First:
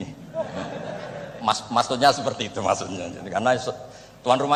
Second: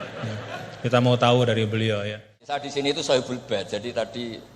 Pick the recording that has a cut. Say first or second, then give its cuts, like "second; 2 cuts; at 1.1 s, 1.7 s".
second; 1 cut; at 2.3 s